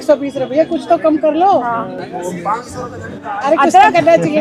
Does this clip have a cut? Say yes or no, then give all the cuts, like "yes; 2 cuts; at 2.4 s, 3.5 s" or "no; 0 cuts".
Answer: no; 0 cuts